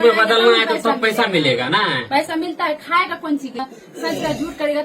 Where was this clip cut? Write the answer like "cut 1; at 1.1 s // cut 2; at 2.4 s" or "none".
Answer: cut 1; at 3.6 s